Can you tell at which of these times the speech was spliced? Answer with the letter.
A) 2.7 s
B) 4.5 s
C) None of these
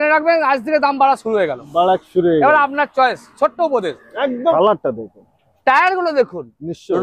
B